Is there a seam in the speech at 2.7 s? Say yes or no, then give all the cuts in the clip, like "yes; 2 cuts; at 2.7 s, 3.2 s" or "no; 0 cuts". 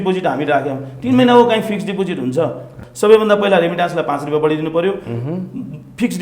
yes; 1 cut; at 2.7 s